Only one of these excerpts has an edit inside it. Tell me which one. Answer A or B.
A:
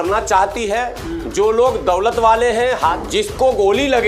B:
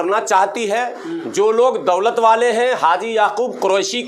A